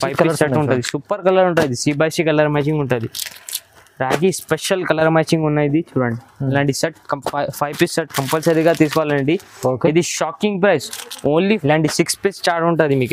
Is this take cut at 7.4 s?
no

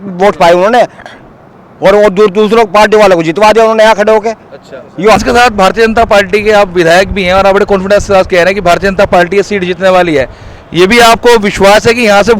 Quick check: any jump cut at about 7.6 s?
no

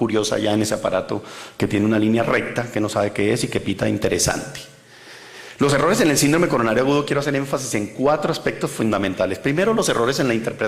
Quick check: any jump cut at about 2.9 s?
yes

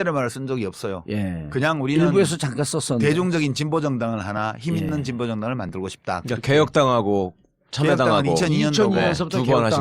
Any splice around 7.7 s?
no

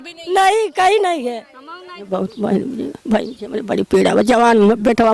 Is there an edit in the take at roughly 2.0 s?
yes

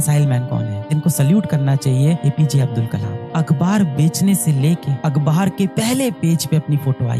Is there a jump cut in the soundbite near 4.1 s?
no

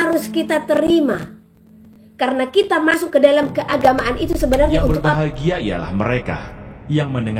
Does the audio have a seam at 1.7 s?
no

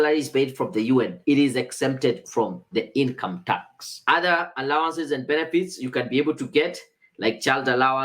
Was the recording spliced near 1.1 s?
yes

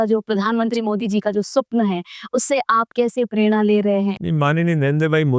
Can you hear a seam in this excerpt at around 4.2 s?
yes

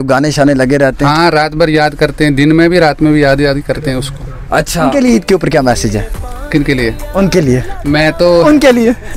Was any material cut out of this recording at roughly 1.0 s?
no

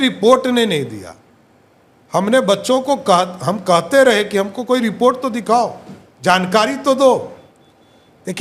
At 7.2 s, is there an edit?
no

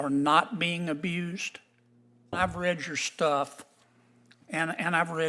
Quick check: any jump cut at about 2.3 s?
yes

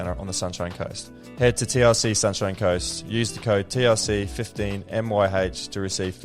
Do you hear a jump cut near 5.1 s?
no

